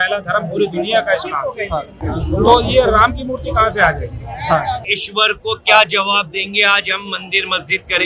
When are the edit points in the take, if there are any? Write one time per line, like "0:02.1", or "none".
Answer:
0:01.9
0:04.8